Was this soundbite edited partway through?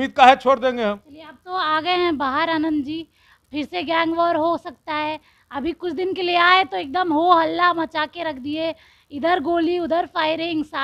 no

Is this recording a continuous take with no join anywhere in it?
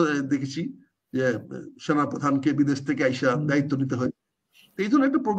yes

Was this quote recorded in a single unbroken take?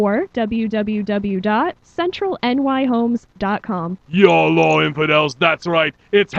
no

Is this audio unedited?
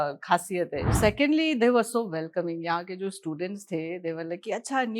no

